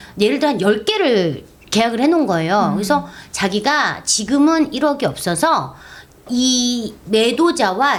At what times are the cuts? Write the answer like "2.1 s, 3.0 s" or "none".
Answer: none